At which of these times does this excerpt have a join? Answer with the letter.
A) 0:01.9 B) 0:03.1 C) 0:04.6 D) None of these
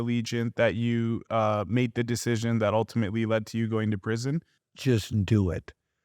C